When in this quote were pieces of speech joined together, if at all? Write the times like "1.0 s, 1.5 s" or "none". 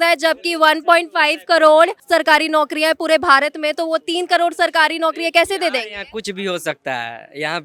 none